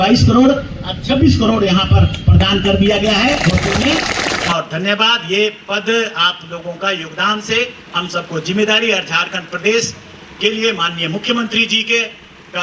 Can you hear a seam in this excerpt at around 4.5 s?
yes; 1 cut; at 4.5 s

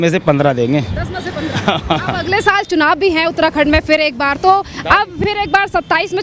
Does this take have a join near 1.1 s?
no; 0 cuts

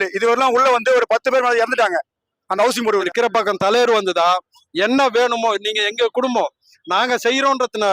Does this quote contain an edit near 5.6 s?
no; 1 cut; at 2.9 s

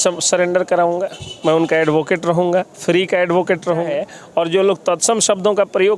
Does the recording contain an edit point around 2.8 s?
no; 1 cut; at 4.0 s

